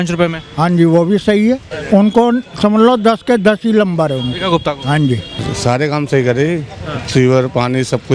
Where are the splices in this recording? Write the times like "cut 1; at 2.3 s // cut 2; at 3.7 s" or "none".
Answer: cut 1; at 1.7 s // cut 2; at 5.4 s